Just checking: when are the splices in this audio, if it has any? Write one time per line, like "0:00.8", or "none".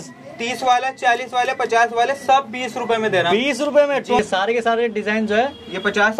0:04.2